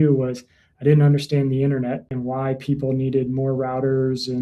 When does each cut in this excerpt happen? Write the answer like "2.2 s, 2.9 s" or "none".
2.1 s